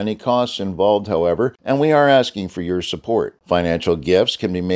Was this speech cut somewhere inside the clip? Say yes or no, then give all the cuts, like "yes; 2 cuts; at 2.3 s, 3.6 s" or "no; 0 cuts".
yes; 1 cut; at 1.6 s